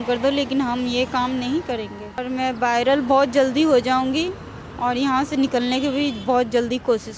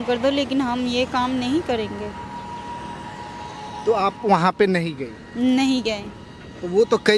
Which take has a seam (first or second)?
first